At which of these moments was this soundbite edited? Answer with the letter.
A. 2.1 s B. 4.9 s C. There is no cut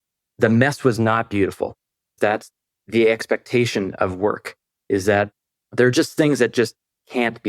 A